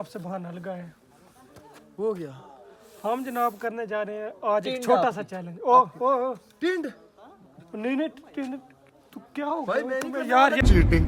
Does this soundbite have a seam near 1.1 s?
no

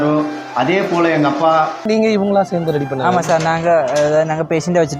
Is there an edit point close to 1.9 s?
yes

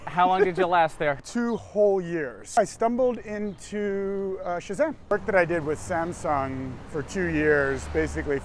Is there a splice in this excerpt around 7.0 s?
no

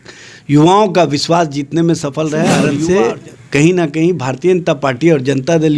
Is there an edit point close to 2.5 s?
yes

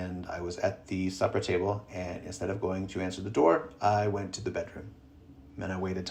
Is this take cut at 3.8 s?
no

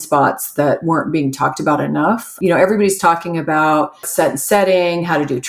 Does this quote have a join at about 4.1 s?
yes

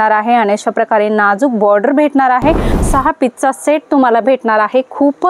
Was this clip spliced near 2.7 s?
yes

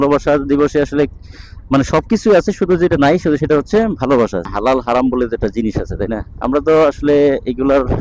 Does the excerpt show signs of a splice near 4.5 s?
yes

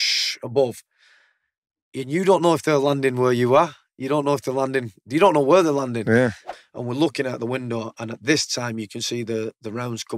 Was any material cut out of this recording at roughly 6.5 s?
yes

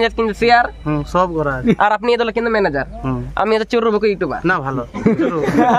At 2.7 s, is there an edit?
no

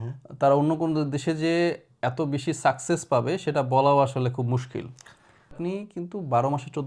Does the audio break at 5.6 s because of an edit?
yes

